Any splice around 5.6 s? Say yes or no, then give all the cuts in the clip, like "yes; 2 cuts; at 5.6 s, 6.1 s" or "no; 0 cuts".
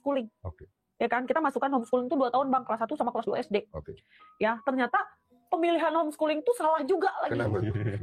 no; 0 cuts